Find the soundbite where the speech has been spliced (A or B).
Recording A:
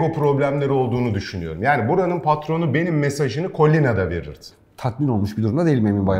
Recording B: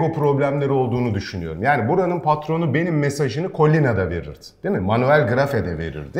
A